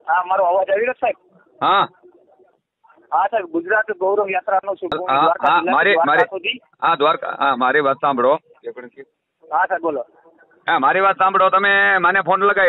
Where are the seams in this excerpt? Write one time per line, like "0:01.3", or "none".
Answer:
0:04.9